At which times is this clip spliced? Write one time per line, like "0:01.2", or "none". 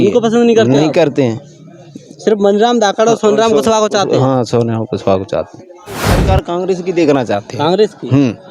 0:06.2